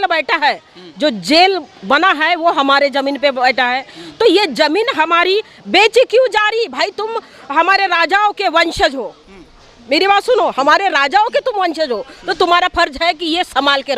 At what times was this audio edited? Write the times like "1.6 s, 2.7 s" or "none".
none